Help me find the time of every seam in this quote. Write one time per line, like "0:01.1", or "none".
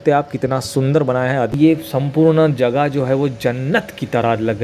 0:01.5